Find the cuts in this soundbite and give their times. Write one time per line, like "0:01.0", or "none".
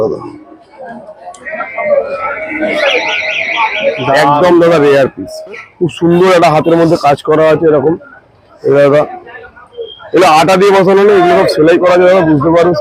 0:05.7